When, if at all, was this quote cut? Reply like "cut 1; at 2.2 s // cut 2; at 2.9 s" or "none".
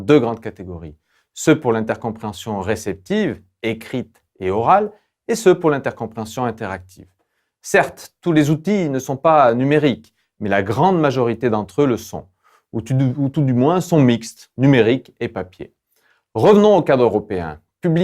cut 1; at 8.8 s